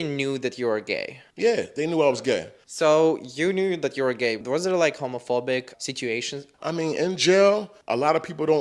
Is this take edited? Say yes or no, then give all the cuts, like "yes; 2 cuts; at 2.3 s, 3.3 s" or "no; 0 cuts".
no; 0 cuts